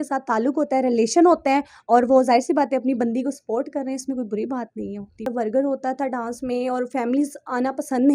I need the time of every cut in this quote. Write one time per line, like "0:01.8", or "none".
0:05.3